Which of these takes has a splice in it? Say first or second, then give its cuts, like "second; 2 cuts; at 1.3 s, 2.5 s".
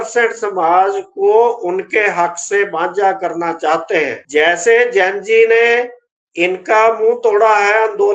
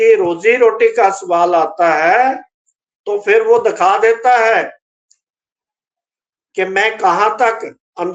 first; 1 cut; at 4.2 s